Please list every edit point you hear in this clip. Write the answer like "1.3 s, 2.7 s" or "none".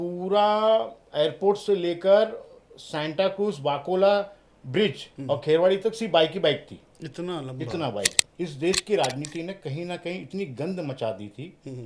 8.2 s